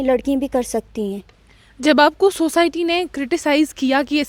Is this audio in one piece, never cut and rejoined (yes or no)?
yes